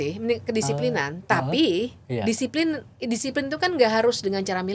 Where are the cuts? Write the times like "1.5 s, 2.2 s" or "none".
none